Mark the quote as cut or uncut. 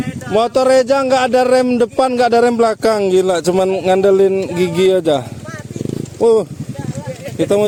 uncut